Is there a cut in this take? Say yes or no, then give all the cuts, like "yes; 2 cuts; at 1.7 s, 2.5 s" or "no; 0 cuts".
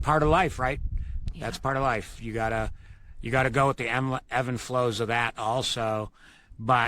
no; 0 cuts